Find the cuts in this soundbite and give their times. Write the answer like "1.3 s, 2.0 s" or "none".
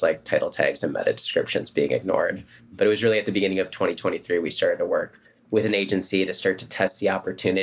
2.7 s